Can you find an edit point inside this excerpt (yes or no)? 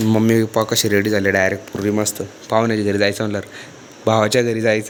no